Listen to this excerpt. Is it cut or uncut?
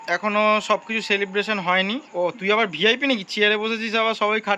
uncut